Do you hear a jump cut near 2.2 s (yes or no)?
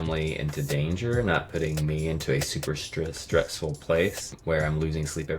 no